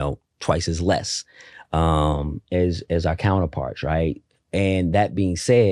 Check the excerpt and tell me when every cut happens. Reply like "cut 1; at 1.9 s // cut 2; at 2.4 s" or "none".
none